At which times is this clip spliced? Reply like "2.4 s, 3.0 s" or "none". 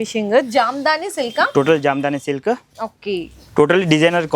none